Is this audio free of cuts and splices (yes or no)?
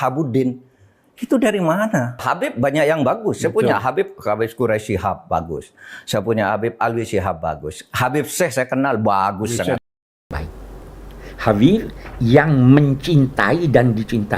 no